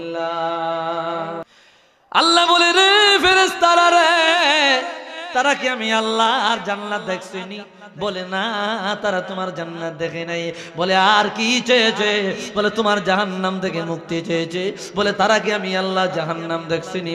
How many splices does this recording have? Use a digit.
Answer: 1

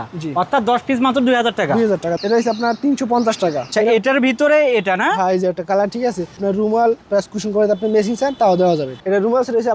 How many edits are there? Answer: 4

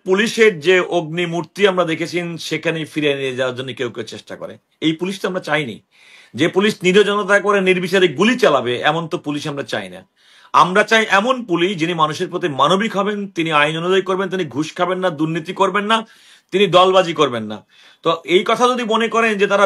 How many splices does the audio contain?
0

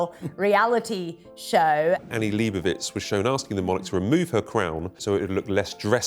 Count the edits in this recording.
2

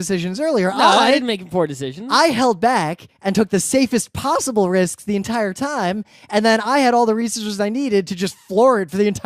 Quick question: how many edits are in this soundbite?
1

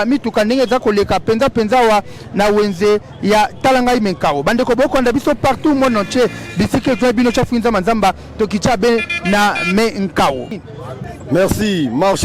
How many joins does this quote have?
1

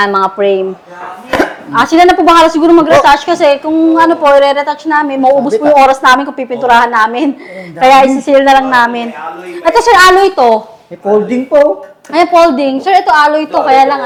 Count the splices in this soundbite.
0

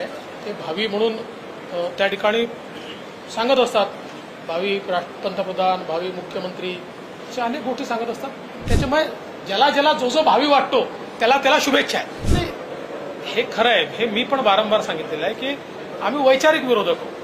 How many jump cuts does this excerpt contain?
2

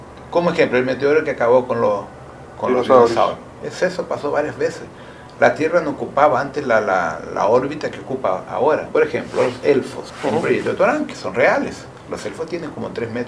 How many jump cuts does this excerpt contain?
3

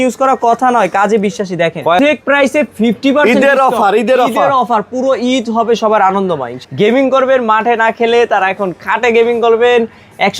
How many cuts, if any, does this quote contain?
2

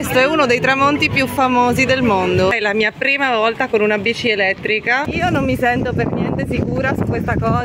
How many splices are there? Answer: 2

